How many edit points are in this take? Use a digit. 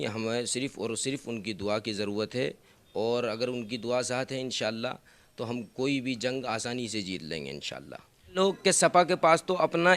1